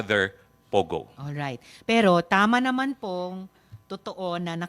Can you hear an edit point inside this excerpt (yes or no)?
no